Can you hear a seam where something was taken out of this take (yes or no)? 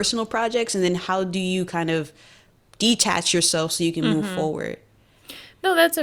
no